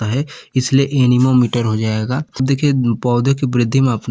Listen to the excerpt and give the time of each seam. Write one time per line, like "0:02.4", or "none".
0:02.3